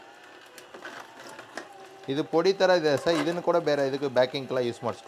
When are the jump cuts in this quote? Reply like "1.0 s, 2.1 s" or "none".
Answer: none

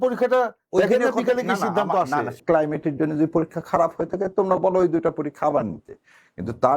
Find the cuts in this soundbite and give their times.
2.4 s

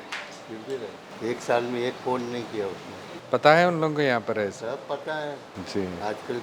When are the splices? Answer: 1.1 s, 5.5 s

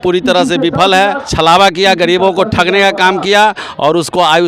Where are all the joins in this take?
1.2 s

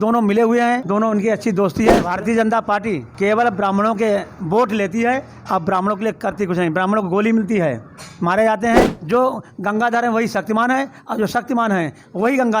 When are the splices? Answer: 0.8 s, 2.1 s, 3.1 s, 9.0 s

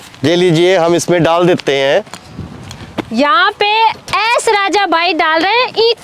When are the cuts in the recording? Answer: 2.1 s

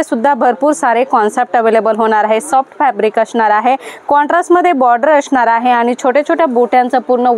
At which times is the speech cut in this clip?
none

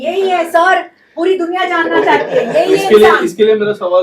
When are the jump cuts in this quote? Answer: none

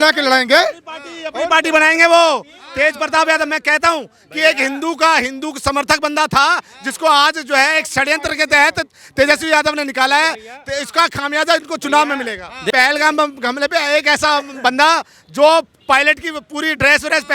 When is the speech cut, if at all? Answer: 12.7 s

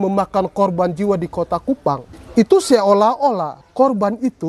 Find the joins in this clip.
2.1 s, 3.6 s

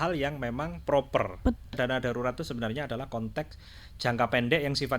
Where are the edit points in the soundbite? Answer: 1.7 s

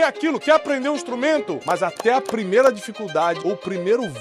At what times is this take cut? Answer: 1.6 s, 3.4 s

